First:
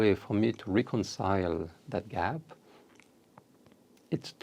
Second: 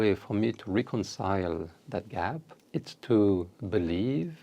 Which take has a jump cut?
second; 1 cut; at 2.5 s

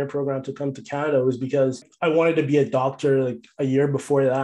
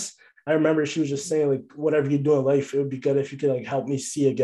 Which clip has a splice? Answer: first; 1 cut; at 1.9 s

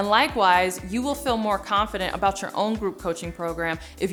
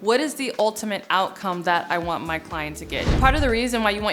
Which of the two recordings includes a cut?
second; 1 cut; at 3.2 s

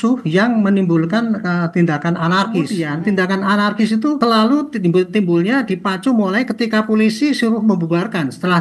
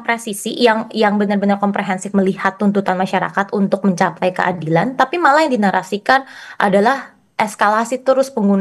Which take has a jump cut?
first; 2 cuts; at 2.8 s, 4.2 s

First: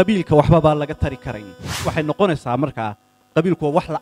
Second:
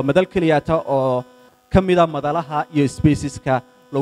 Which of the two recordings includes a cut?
first; 1 cut; at 1.8 s

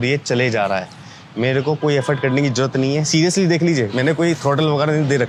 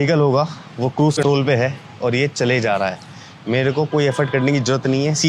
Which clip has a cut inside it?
second; 1 cut; at 1.2 s

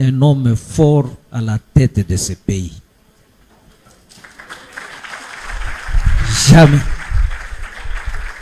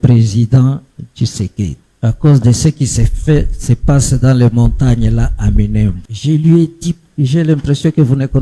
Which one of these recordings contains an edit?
second; 3 cuts; at 1.8 s, 6.1 s, 7.0 s

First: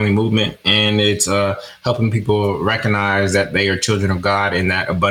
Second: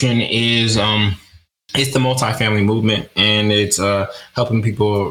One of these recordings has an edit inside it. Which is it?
second; 1 cut; at 1.6 s

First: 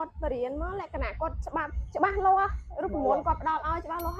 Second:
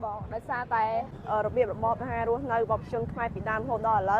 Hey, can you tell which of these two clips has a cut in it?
second; 1 cut; at 1.2 s

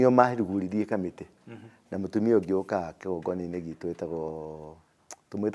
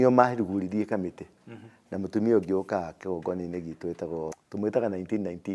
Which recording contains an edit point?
second; 1 cut; at 4.4 s

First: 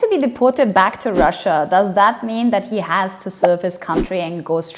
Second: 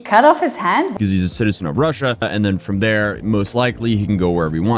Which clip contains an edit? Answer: second; 2 cuts; at 0.9 s, 2.2 s

